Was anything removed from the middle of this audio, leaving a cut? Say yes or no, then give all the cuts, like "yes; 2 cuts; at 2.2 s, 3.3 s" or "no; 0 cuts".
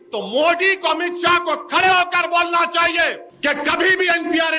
yes; 1 cut; at 3.3 s